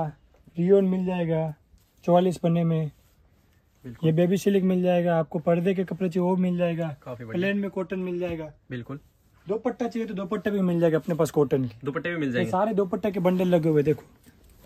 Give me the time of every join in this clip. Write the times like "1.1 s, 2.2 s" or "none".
none